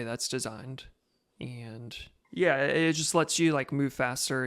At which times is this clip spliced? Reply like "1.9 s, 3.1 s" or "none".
2.1 s